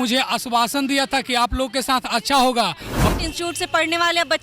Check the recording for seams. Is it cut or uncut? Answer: cut